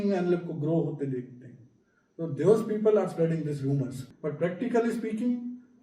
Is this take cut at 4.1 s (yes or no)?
yes